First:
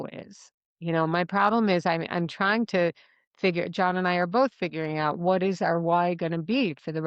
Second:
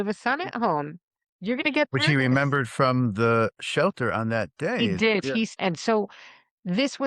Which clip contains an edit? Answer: second; 1 cut; at 5.1 s

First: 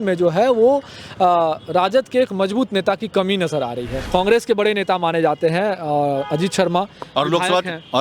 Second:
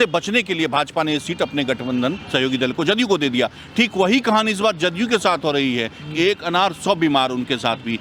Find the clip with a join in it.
first; 1 cut; at 4.0 s

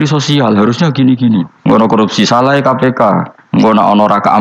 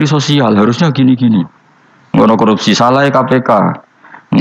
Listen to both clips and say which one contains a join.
first; 2 cuts; at 1.8 s, 3.3 s

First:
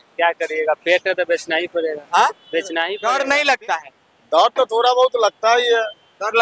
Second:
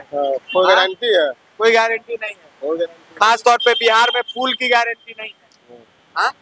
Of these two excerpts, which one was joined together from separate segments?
first; 1 cut; at 2.9 s

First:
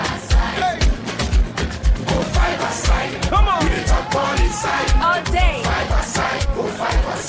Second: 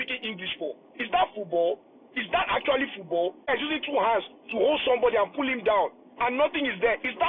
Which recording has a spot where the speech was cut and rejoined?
second; 1 cut; at 3.5 s

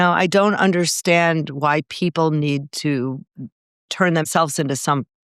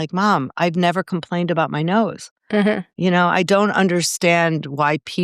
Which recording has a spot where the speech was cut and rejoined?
first; 1 cut; at 4.2 s

